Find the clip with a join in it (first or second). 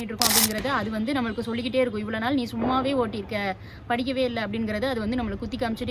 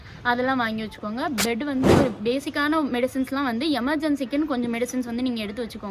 second